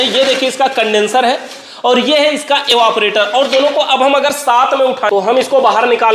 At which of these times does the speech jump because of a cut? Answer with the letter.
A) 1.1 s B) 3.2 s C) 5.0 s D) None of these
C